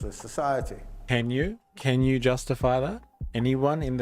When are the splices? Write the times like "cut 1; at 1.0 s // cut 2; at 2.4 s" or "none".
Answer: cut 1; at 1.0 s